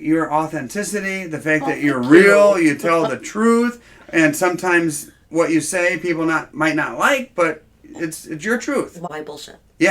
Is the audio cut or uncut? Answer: cut